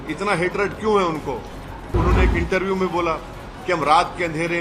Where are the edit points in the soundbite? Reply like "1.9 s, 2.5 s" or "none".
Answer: 1.9 s